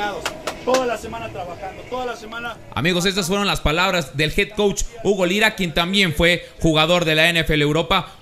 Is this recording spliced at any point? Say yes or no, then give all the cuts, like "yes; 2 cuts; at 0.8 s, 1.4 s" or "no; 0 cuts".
no; 0 cuts